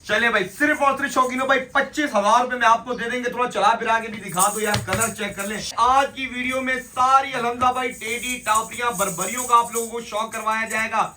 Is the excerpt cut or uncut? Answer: cut